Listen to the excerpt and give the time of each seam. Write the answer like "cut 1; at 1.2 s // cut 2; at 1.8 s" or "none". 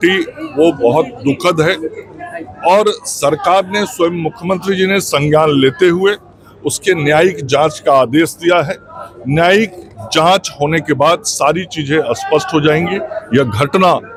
none